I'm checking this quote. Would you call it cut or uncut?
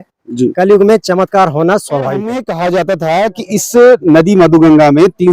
cut